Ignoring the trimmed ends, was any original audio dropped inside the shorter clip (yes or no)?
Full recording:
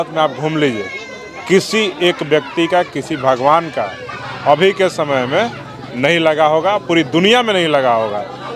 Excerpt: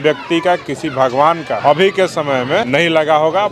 yes